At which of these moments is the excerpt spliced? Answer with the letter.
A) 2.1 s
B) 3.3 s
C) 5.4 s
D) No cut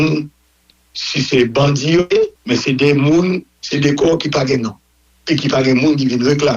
A